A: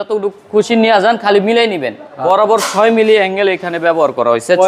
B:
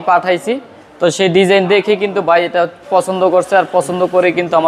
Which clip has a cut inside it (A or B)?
A